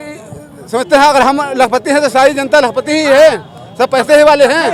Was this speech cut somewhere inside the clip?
no; 0 cuts

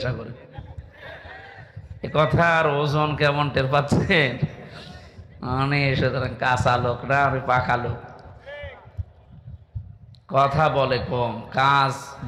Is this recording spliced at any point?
no; 0 cuts

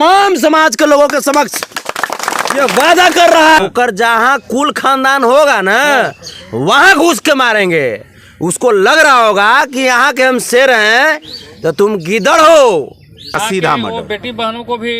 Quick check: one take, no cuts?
no; 2 cuts; at 3.6 s, 13.3 s

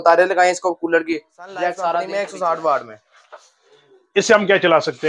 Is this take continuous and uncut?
no; 1 cut; at 2.1 s

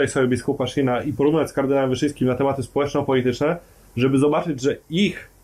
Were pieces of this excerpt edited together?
no; 0 cuts

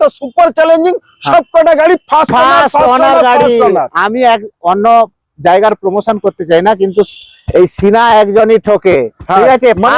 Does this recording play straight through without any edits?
yes; 0 cuts

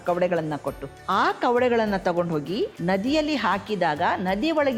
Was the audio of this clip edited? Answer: yes; 2 cuts; at 0.9 s, 2.8 s

